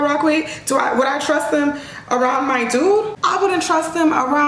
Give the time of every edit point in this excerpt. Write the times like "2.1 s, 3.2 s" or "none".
3.2 s